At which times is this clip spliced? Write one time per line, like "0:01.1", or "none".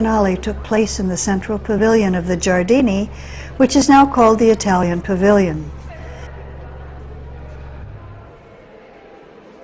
0:01.6